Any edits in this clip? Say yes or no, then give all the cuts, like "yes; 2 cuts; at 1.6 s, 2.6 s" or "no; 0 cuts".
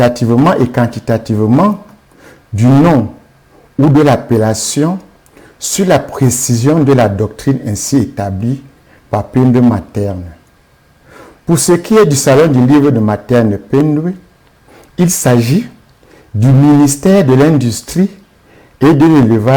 no; 0 cuts